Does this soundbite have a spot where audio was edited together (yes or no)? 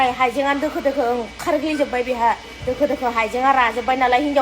no